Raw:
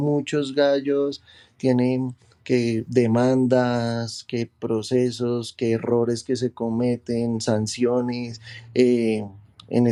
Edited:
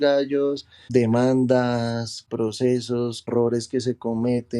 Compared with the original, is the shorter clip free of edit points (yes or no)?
no